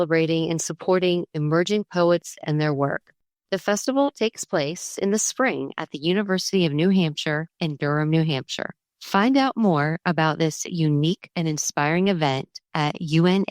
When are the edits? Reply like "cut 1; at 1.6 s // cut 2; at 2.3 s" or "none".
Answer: none